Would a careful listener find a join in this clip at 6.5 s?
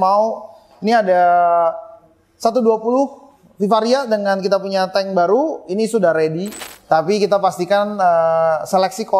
yes; 1 cut; at 6.5 s

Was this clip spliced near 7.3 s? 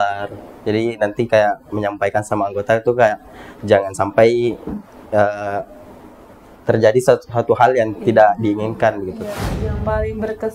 no; 1 cut; at 9.5 s

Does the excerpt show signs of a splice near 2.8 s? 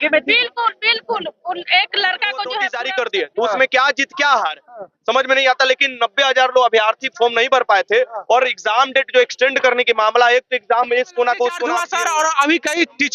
yes; 2 cuts; at 2.8 s, 11.8 s

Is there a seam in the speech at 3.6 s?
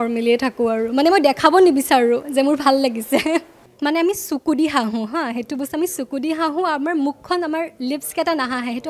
yes; 1 cut; at 3.6 s

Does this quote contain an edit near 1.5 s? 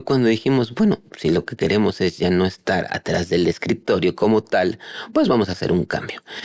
no; 0 cuts

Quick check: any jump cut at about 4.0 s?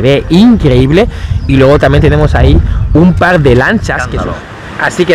yes; 1 cut; at 4.0 s

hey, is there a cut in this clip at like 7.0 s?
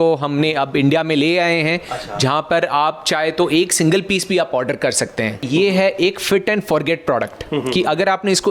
no; 1 cut; at 5.4 s

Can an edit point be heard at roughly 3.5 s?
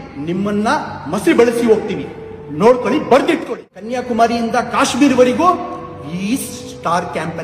yes; 1 cut; at 3.5 s

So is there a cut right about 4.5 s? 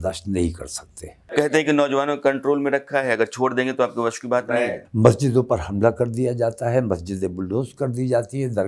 yes; 2 cuts; at 1.5 s, 4.5 s

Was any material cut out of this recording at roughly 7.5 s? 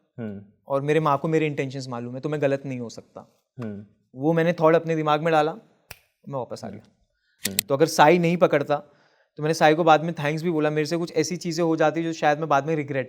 yes; 1 cut; at 7.5 s

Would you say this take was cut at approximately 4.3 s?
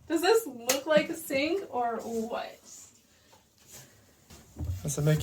yes; 1 cut; at 4.3 s

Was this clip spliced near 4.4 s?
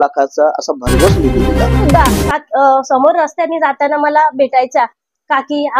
no; 1 cut; at 1.8 s

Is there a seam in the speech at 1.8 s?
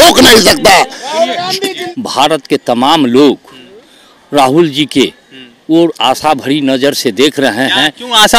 yes; 1 cut; at 1.8 s

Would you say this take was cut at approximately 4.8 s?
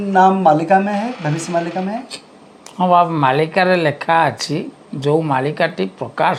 no; 0 cuts

